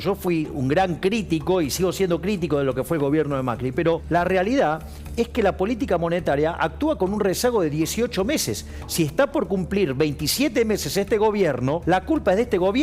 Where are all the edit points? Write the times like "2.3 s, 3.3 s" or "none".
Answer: 4.0 s, 11.8 s